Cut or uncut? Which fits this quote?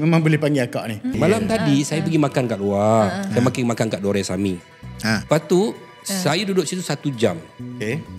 cut